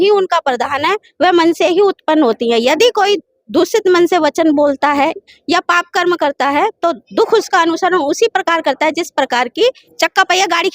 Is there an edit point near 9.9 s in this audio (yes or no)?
yes